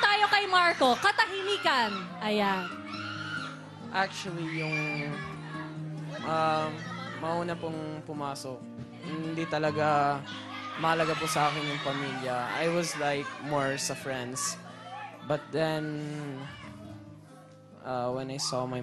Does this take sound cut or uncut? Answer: uncut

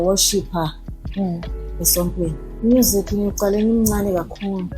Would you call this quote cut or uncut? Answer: cut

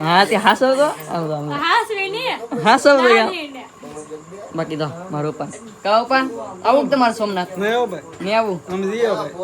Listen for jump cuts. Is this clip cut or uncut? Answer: uncut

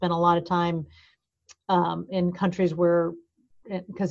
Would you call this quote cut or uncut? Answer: uncut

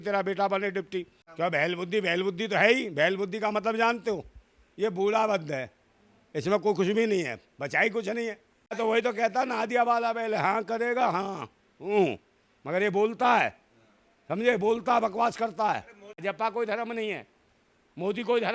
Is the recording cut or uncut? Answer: cut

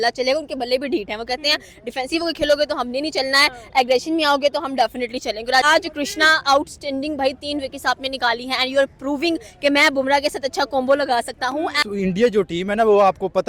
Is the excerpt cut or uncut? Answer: cut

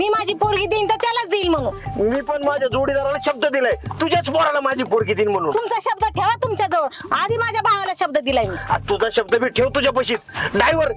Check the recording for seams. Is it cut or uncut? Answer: uncut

